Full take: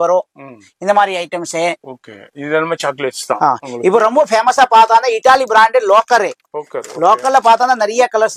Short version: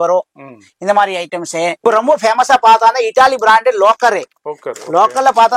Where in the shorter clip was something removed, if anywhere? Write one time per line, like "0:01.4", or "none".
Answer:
0:01.8